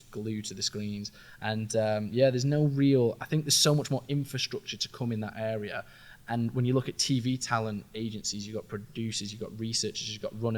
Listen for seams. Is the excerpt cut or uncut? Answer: uncut